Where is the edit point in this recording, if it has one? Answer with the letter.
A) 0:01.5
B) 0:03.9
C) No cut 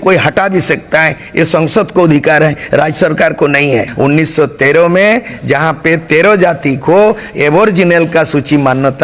B